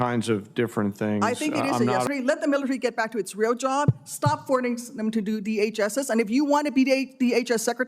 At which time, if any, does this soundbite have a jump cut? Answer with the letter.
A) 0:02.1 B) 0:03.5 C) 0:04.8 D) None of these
A